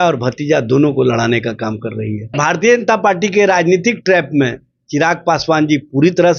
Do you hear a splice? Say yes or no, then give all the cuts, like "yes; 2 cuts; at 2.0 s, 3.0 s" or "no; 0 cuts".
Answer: yes; 1 cut; at 2.3 s